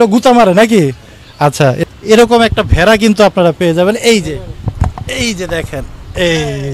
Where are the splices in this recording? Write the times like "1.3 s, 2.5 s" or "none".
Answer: 1.8 s